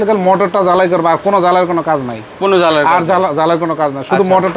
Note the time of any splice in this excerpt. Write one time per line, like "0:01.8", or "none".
none